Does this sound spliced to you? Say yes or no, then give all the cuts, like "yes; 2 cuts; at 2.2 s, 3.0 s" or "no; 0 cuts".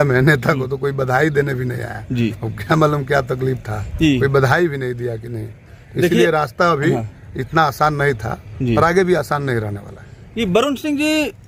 no; 0 cuts